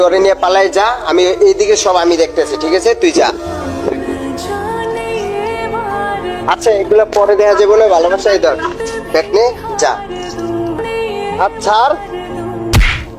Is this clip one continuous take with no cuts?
no; 1 cut; at 10.8 s

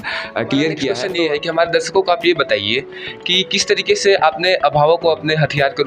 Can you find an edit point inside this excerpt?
yes; 1 cut; at 1.0 s

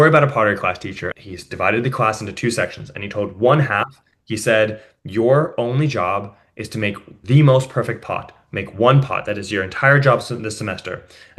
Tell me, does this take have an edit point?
yes; 2 cuts; at 1.1 s, 7.1 s

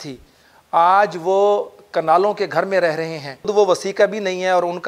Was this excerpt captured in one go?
no; 1 cut; at 3.5 s

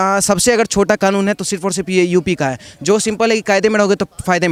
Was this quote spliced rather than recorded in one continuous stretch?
no; 0 cuts

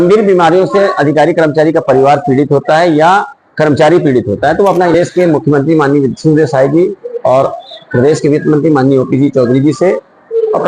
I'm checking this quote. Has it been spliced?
yes; 1 cut; at 4.9 s

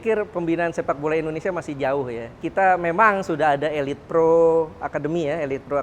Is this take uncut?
no; 1 cut; at 2.4 s

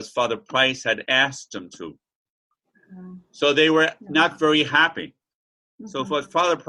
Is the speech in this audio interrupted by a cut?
no; 0 cuts

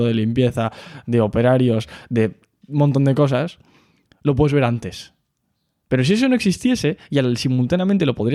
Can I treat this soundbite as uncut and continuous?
yes; 0 cuts

